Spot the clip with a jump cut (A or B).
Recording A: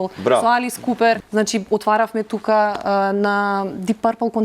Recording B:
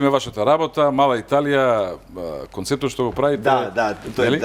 A